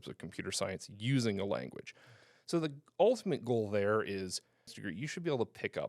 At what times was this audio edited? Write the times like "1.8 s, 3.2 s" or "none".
4.8 s